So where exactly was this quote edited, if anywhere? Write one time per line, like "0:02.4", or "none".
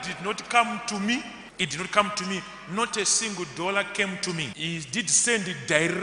0:01.4
0:04.5